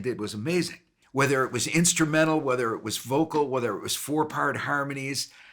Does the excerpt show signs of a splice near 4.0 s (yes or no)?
no